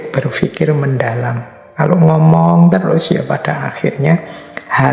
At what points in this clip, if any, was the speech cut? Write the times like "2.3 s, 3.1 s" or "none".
none